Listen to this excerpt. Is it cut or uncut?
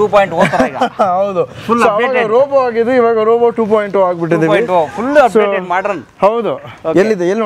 uncut